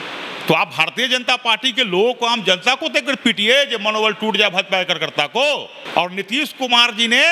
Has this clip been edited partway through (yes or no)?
yes